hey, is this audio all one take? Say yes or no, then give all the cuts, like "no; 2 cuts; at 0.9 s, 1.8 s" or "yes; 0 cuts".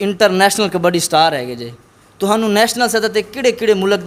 yes; 0 cuts